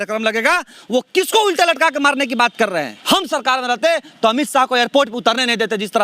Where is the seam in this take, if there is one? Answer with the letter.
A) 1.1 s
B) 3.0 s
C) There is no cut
B